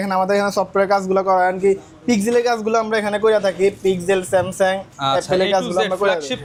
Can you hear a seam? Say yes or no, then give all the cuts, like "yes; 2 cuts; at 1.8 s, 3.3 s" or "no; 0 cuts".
no; 0 cuts